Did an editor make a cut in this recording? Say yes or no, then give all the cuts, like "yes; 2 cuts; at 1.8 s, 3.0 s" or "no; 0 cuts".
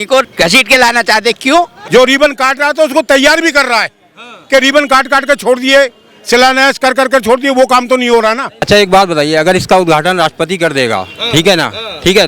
yes; 2 cuts; at 1.8 s, 8.6 s